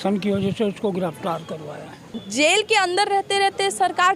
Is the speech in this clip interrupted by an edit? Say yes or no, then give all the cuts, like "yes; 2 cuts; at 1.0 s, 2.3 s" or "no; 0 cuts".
yes; 1 cut; at 2.2 s